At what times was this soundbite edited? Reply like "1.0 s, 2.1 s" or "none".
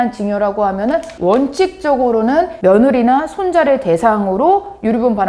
1.1 s, 2.5 s